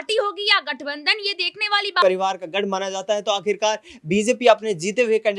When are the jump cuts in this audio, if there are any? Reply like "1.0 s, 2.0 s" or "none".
2.0 s